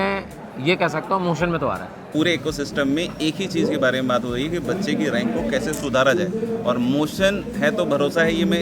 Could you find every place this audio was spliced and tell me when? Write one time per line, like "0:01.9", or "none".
0:02.1